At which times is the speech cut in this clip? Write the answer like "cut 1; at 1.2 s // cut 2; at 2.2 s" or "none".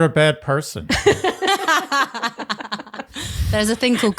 cut 1; at 3.1 s